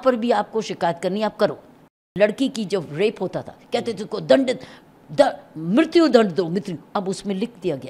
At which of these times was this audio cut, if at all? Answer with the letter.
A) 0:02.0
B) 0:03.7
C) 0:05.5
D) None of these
A